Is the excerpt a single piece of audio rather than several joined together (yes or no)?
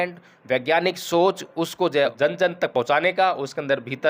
no